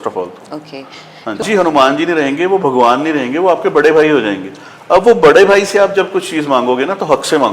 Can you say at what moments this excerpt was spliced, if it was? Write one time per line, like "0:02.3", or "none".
0:01.4